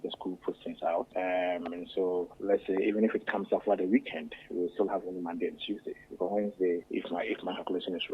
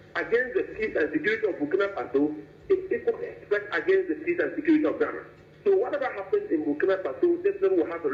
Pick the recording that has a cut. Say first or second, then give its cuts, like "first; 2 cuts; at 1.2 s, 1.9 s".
first; 3 cuts; at 1.1 s, 2.3 s, 6.9 s